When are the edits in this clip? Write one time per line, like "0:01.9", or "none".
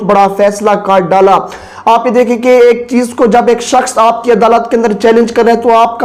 none